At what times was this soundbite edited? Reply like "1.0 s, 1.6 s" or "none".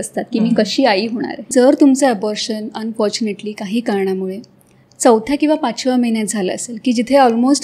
1.5 s